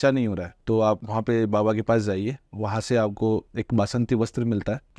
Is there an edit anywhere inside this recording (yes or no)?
yes